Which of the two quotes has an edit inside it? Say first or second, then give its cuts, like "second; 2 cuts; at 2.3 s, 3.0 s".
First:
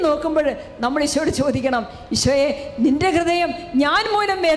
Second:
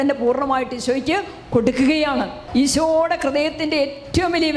second; 1 cut; at 2.4 s